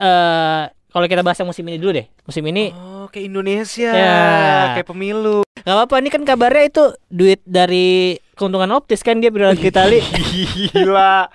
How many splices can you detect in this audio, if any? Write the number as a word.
one